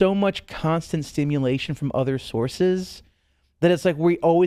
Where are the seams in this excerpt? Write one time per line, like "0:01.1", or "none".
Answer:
none